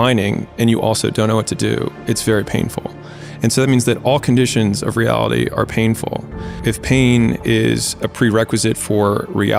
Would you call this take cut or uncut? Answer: cut